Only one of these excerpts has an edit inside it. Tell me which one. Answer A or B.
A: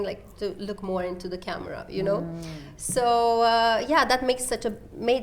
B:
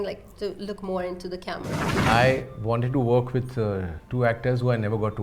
B